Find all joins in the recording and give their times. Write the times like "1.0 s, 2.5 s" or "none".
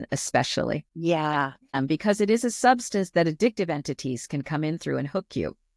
0.9 s, 1.8 s